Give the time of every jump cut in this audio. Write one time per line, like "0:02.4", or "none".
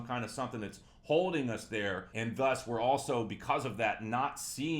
0:02.1